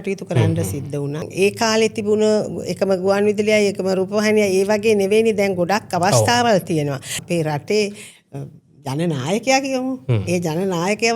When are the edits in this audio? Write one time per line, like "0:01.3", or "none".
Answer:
0:01.3
0:07.2